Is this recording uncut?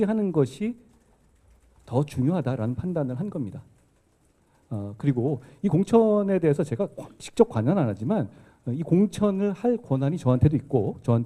yes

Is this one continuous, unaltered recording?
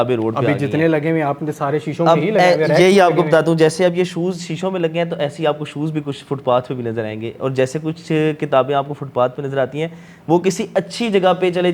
yes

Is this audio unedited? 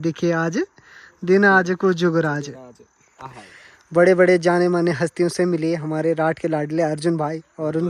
yes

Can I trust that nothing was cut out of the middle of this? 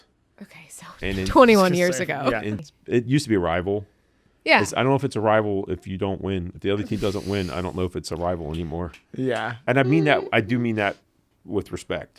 no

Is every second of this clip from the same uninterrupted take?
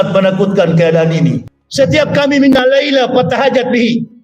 no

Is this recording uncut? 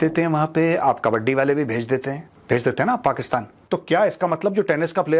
no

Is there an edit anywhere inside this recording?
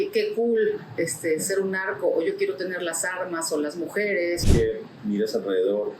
yes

